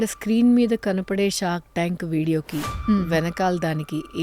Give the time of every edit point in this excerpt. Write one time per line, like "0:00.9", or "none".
none